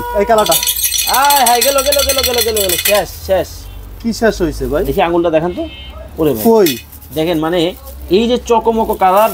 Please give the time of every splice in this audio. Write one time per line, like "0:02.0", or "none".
none